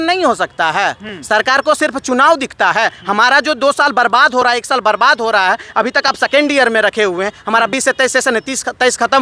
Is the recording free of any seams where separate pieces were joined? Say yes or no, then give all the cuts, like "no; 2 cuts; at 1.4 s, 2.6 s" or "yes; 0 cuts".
yes; 0 cuts